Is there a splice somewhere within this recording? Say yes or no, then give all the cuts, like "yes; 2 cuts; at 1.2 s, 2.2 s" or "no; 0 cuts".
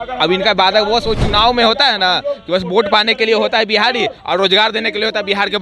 no; 0 cuts